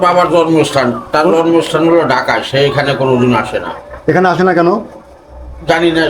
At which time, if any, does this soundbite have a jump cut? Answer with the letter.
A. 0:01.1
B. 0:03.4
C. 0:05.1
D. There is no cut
D